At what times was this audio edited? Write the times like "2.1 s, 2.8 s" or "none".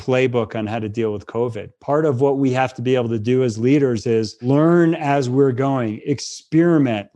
4.4 s

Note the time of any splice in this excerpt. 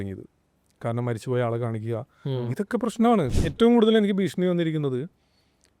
3.3 s

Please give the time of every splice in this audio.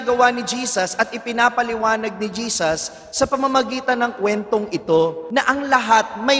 5.2 s

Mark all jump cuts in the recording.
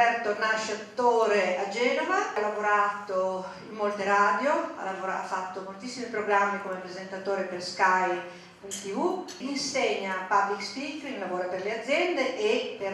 2.4 s, 9.4 s

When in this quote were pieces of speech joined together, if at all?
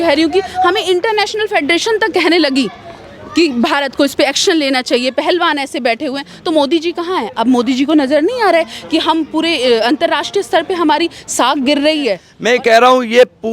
12.3 s

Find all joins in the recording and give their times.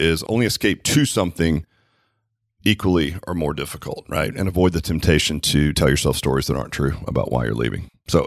none

